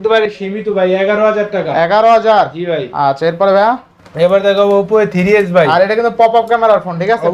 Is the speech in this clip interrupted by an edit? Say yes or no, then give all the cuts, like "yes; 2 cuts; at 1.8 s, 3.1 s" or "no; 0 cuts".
no; 0 cuts